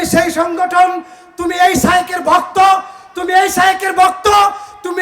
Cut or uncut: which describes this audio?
uncut